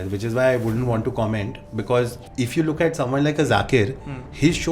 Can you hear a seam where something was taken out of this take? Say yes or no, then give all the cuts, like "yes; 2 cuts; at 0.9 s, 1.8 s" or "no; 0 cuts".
yes; 1 cut; at 2.2 s